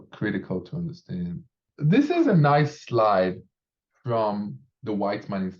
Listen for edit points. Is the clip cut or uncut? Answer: cut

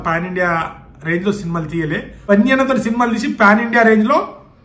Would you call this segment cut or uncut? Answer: cut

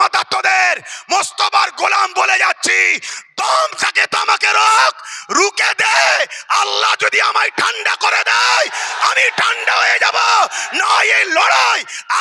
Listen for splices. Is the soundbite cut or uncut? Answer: uncut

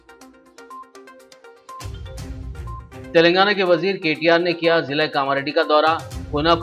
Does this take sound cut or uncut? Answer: cut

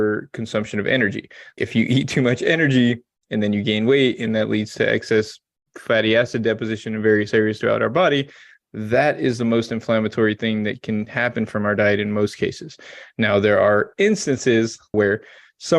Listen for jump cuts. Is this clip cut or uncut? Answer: cut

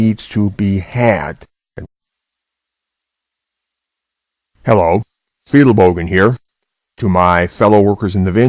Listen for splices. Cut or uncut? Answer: uncut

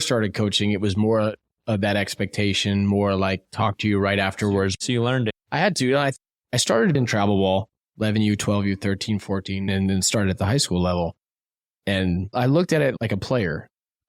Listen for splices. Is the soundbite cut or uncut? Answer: uncut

